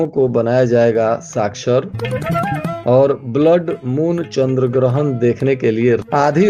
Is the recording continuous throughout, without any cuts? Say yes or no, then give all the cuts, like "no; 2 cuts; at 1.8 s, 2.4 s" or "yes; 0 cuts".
yes; 0 cuts